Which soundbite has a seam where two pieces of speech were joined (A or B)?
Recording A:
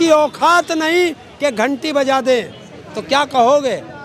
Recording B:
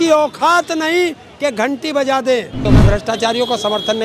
B